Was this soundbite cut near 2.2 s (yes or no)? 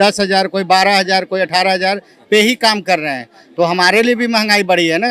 no